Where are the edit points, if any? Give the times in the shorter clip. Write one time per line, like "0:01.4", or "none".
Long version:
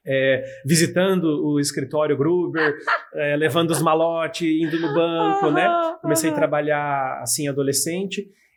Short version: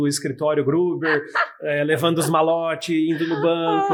none